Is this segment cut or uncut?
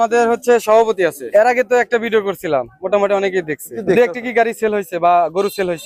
cut